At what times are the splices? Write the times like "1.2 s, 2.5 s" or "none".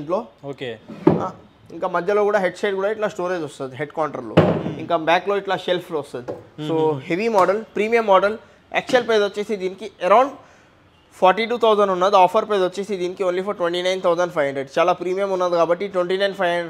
none